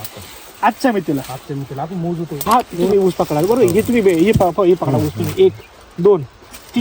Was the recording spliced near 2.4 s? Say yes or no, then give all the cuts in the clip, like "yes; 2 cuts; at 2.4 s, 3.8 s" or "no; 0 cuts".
yes; 1 cut; at 2.4 s